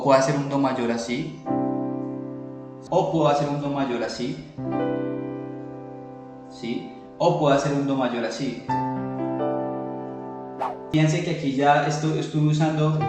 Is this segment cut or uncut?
cut